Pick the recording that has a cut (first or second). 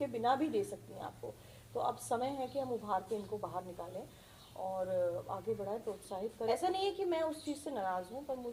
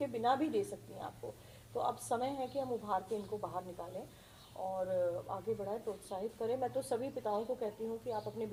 first